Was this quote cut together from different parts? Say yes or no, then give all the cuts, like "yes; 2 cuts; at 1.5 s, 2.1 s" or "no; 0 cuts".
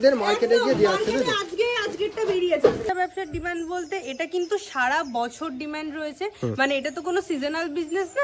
yes; 1 cut; at 2.9 s